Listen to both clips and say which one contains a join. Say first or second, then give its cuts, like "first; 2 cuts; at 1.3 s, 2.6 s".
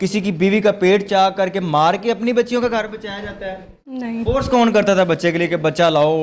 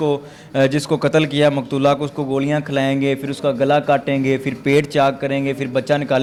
first; 1 cut; at 4.0 s